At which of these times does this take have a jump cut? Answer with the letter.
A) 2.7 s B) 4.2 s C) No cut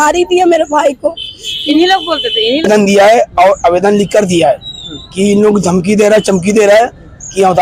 A